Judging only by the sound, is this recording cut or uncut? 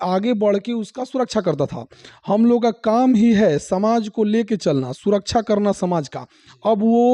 uncut